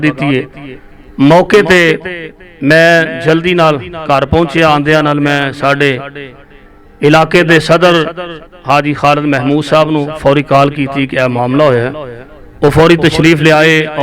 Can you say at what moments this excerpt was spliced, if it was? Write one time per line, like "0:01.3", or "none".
none